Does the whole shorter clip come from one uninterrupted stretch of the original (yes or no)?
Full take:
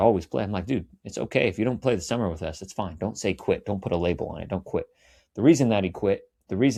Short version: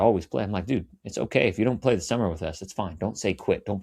yes